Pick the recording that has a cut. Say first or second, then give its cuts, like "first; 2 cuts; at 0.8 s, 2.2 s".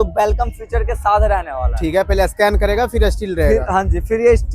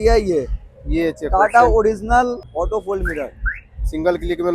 second; 1 cut; at 2.5 s